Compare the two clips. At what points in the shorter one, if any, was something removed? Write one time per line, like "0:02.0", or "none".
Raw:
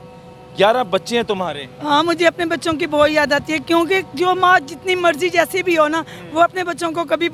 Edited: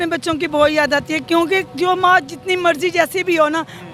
none